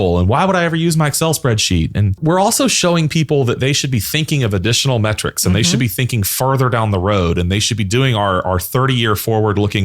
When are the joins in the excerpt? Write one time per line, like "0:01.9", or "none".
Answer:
0:02.2